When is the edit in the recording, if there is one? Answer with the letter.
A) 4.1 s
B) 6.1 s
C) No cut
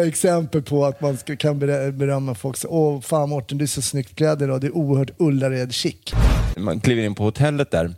B